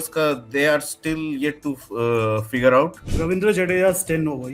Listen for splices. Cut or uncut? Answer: cut